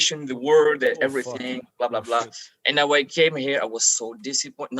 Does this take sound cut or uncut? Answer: uncut